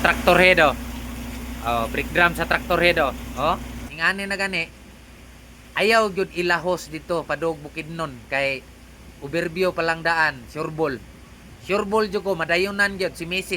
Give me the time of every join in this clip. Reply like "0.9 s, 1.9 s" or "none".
3.9 s